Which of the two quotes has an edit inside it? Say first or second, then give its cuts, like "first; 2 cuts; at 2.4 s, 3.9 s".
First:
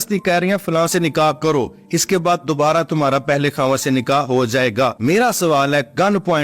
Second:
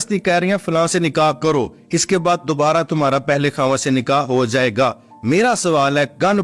first; 1 cut; at 4.9 s